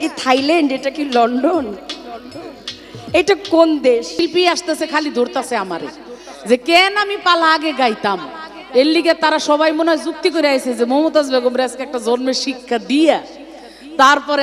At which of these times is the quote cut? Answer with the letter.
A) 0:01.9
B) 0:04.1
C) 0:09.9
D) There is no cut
B